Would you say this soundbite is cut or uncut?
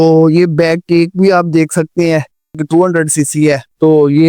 cut